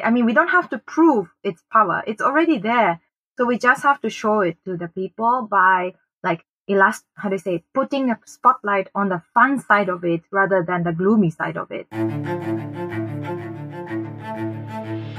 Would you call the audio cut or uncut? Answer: cut